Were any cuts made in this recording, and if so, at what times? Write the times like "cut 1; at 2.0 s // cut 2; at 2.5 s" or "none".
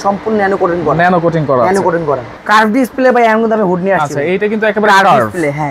cut 1; at 2.4 s